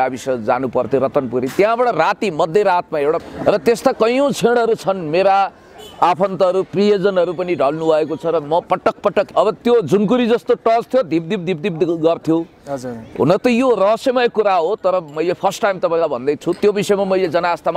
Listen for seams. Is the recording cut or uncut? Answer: cut